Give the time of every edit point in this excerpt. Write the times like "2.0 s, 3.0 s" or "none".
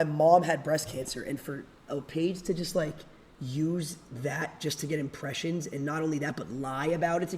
none

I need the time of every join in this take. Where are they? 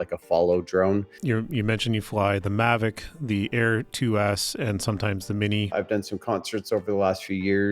1.1 s, 5.7 s

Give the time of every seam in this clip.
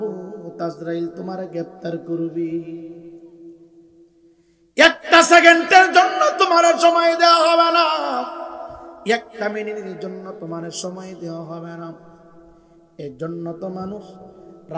none

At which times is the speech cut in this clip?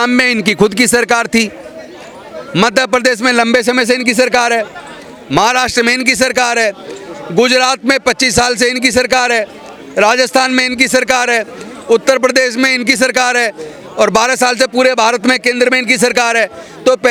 none

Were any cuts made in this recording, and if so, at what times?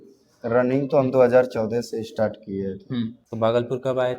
3.2 s

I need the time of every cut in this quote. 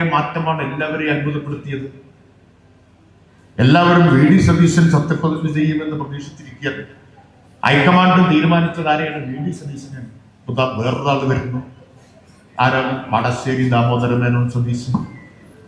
none

